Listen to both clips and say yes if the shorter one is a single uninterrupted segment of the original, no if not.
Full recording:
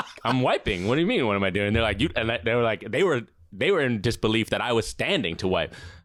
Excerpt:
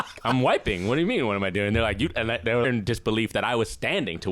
no